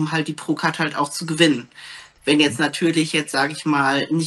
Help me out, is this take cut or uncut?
uncut